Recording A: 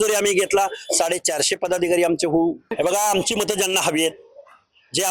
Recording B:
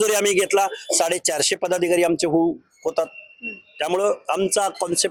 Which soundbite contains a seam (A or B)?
A